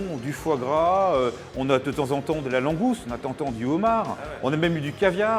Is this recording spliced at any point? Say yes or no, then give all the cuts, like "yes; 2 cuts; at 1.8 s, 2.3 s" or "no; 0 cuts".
no; 0 cuts